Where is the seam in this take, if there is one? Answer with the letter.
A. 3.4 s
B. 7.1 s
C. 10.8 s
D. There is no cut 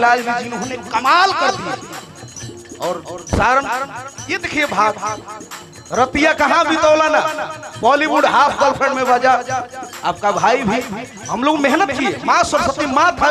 D